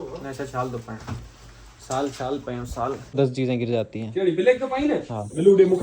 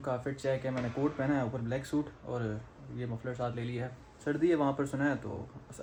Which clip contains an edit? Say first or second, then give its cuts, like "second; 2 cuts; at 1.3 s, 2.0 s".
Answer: first; 1 cut; at 3.2 s